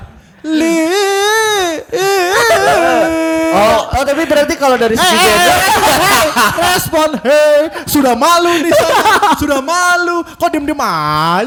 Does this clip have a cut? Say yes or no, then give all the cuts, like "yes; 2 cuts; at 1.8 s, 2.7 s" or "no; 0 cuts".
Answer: no; 0 cuts